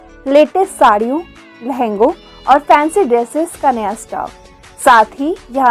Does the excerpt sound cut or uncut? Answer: uncut